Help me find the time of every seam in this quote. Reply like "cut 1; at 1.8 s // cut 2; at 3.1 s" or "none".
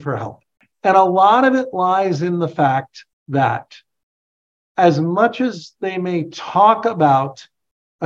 none